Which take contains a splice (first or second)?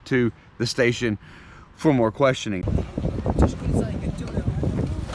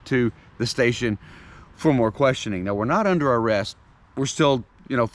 first